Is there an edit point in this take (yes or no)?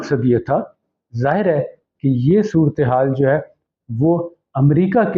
yes